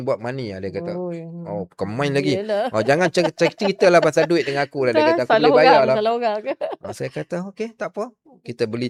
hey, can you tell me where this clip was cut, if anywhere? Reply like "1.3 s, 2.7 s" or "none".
none